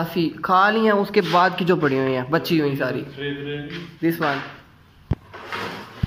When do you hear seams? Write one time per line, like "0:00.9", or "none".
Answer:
none